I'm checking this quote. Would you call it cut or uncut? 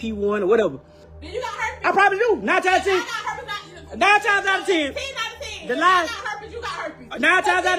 cut